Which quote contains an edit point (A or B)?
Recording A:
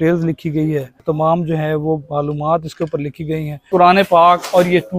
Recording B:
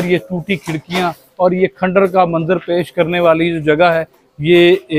A